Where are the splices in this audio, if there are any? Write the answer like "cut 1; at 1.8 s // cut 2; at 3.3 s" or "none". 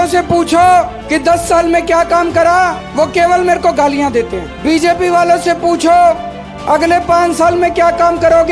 cut 1; at 1.0 s // cut 2; at 2.8 s // cut 3; at 4.4 s